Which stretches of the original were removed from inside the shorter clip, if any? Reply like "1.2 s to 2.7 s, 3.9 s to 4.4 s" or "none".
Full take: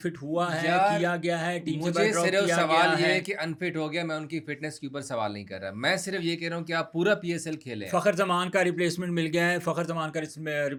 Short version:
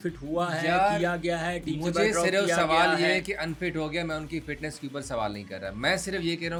none